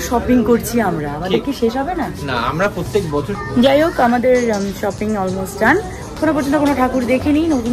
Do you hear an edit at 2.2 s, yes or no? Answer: no